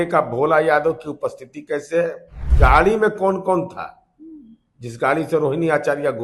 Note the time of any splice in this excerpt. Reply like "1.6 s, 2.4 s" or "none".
2.5 s